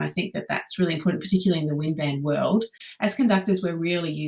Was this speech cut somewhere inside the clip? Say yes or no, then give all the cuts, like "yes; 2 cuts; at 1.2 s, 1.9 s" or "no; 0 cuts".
yes; 1 cut; at 2.8 s